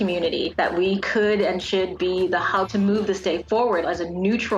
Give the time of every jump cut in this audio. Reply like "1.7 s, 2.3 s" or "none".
2.7 s